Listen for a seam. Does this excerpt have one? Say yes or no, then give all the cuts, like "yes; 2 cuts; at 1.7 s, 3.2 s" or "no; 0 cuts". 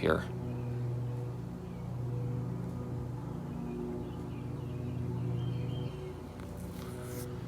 yes; 1 cut; at 5.9 s